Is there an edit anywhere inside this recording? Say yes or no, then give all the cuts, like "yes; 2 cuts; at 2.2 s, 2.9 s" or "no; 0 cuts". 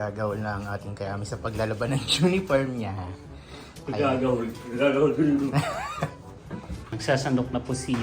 yes; 1 cut; at 6.9 s